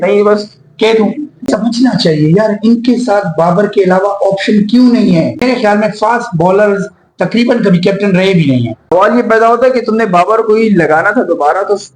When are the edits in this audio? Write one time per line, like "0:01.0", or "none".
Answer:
0:01.5
0:05.4
0:08.8